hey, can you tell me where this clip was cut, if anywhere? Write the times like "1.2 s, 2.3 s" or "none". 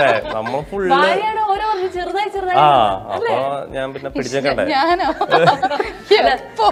none